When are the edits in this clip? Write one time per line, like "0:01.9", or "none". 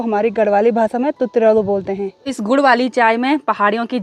0:02.3